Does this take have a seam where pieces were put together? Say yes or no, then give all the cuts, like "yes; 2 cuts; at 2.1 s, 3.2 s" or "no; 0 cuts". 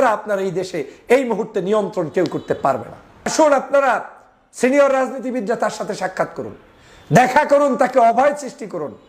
yes; 1 cut; at 3.3 s